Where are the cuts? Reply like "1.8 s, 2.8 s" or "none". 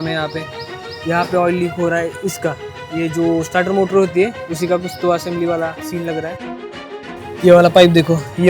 6.7 s